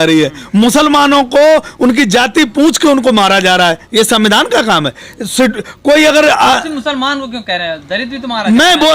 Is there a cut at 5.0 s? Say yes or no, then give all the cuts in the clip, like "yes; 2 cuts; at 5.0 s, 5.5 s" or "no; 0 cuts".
no; 0 cuts